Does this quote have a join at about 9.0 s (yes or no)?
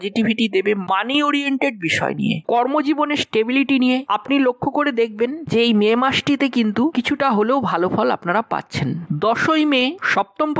yes